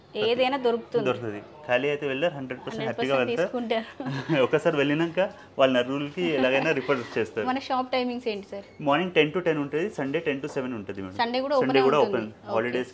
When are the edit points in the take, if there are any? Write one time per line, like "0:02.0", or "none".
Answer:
none

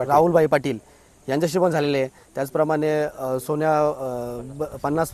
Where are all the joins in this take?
none

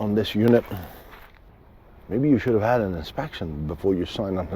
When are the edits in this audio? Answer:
0:01.3

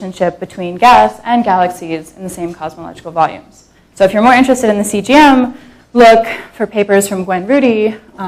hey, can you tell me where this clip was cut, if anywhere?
0:01.2

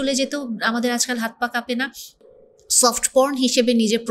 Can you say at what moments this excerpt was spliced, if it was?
none

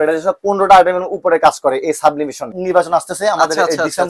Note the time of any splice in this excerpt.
0:02.5

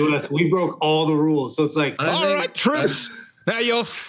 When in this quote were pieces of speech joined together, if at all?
0:02.0

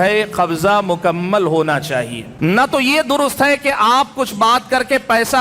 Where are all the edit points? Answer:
0:02.2

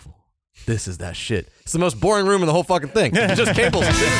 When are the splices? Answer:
none

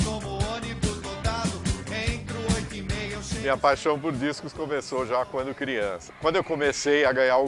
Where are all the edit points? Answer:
0:03.4
0:06.0

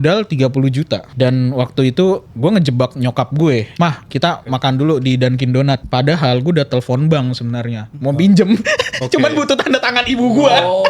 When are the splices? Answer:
0:01.1
0:02.3
0:03.7
0:05.8

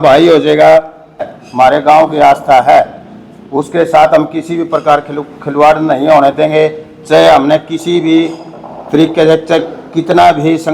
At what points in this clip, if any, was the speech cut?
0:01.4

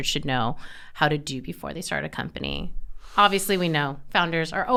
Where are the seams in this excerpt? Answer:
none

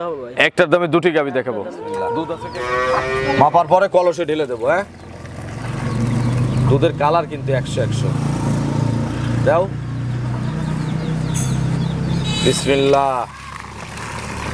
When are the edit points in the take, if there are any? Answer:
0:02.4

